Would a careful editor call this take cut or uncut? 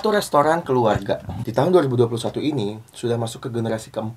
cut